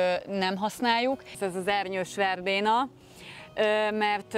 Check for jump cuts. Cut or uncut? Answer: cut